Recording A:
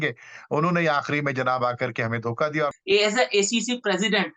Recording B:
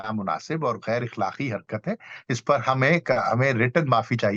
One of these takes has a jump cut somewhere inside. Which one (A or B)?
A